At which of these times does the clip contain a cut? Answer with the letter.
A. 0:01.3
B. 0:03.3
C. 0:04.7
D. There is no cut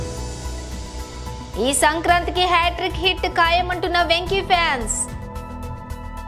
A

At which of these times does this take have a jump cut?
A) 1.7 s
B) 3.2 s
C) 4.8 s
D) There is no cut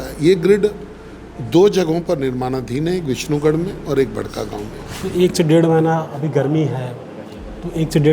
C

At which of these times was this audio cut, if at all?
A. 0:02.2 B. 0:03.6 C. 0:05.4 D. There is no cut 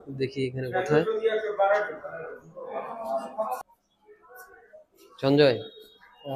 B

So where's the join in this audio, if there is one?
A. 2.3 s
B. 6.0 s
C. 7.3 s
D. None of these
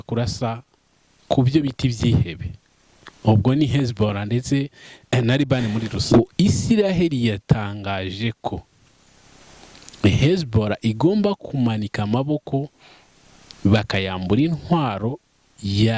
B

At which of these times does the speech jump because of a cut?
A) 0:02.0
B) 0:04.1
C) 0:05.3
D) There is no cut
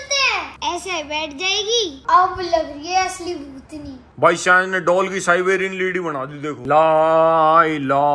A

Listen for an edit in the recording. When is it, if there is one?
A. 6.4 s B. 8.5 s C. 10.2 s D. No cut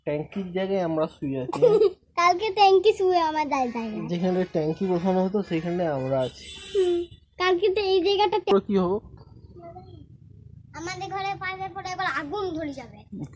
B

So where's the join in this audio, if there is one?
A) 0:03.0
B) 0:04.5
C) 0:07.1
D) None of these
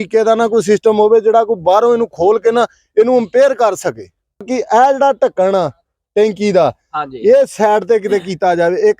B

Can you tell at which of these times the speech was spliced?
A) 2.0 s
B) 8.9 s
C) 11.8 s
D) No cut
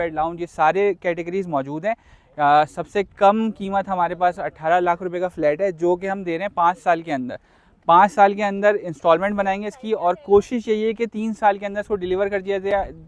D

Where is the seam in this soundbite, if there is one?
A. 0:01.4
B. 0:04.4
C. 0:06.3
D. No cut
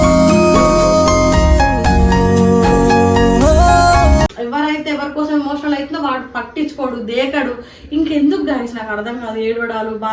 B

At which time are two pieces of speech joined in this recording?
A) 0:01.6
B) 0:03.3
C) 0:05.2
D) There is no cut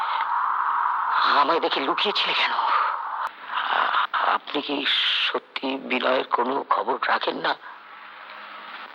B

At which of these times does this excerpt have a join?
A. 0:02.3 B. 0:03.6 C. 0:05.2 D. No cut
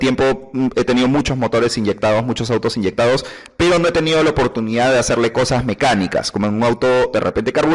A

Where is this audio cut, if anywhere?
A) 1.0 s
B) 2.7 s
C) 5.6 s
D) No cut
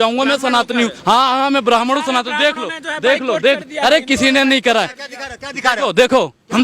A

